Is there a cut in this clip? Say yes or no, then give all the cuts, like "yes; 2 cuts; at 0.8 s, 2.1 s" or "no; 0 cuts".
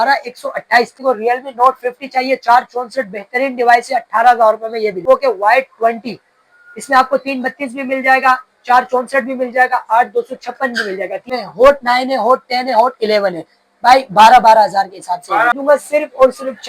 yes; 4 cuts; at 0.9 s, 5.0 s, 11.3 s, 15.6 s